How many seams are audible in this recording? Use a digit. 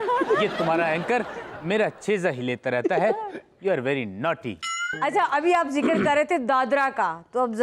1